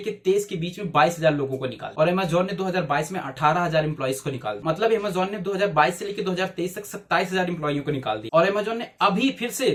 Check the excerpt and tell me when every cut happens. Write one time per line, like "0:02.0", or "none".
none